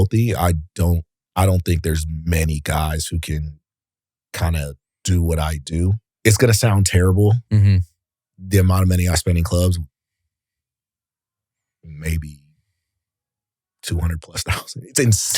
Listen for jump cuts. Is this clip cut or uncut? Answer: cut